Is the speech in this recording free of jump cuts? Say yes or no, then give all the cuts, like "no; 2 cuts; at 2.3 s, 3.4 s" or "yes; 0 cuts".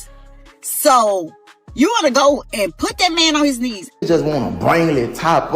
no; 1 cut; at 3.8 s